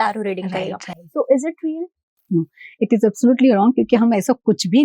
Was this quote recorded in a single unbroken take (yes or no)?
yes